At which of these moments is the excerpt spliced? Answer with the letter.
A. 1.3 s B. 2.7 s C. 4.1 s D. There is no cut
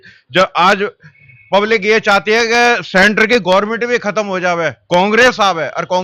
D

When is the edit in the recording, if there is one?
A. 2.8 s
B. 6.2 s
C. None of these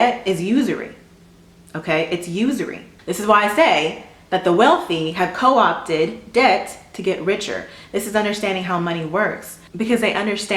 A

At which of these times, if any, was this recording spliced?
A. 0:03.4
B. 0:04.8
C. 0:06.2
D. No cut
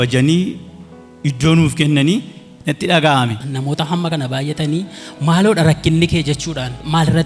A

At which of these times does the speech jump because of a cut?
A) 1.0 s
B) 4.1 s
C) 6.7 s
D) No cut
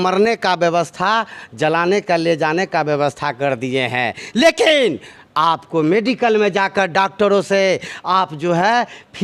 D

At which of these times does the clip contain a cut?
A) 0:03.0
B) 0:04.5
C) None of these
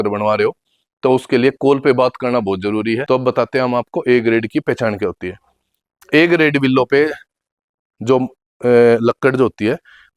A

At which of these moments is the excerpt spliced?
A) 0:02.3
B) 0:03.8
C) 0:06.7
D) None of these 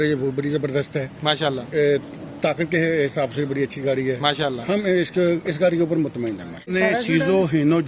C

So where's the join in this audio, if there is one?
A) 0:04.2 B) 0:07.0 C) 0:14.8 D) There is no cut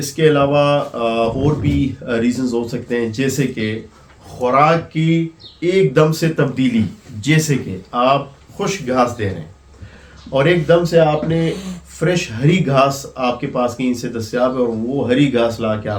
D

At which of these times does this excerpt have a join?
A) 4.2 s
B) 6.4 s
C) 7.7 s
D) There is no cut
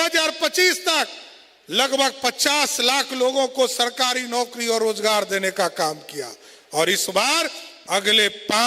C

